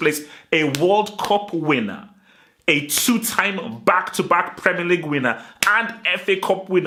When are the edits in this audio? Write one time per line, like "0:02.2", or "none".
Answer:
none